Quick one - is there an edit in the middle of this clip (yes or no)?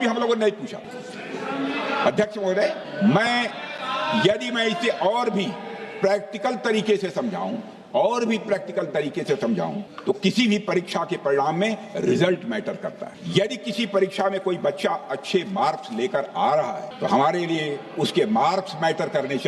no